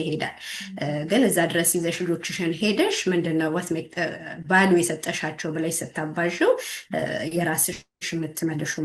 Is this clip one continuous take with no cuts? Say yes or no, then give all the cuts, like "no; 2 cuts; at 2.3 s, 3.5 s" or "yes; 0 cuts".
yes; 0 cuts